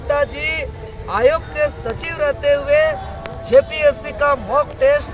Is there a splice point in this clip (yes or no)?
no